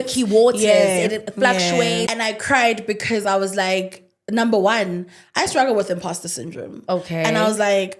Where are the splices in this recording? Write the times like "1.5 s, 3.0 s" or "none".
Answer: 2.1 s